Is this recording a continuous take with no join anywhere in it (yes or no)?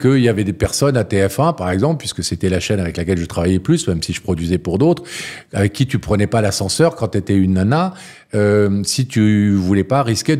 yes